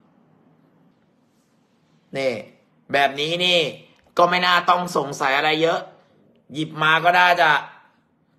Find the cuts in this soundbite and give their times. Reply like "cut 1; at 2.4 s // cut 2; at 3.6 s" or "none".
cut 1; at 0.9 s